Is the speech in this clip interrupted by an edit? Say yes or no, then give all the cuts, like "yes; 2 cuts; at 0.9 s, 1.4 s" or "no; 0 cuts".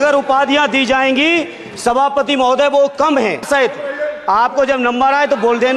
yes; 1 cut; at 3.4 s